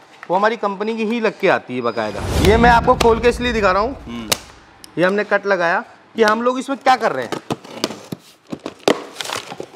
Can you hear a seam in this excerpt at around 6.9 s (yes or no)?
no